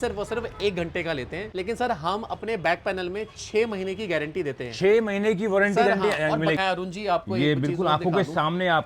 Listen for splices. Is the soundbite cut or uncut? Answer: cut